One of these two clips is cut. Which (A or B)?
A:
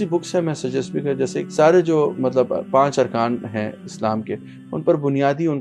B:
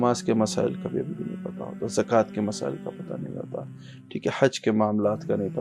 A